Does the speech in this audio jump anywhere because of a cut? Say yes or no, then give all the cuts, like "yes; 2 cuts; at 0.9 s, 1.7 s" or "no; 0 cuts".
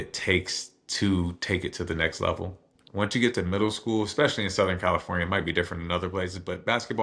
no; 0 cuts